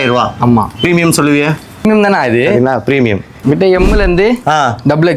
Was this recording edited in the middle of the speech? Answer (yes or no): yes